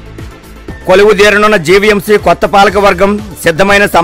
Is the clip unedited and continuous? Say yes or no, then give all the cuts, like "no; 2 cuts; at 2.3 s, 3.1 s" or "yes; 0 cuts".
yes; 0 cuts